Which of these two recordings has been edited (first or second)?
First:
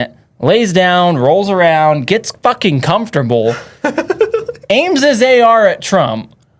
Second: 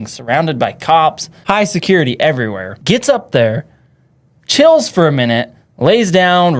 second